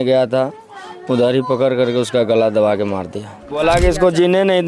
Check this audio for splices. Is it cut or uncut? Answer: cut